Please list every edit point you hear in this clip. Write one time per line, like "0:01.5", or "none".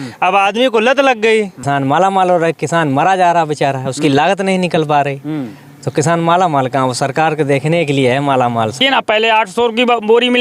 0:01.6
0:08.8